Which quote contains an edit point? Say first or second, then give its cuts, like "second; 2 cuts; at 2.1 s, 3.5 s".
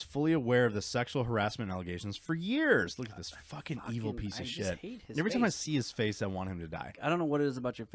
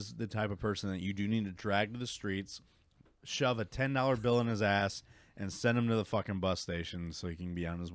first; 1 cut; at 7.0 s